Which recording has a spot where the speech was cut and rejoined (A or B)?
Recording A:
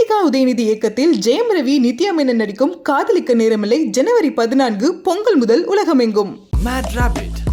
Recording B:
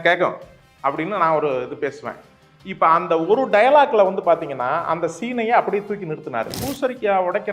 B